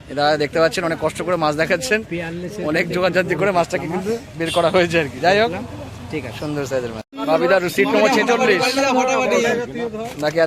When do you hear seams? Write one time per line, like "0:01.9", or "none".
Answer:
0:07.0